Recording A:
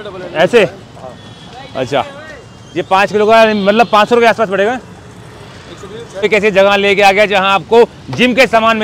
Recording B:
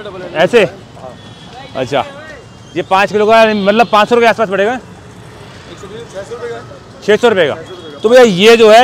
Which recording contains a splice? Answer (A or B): A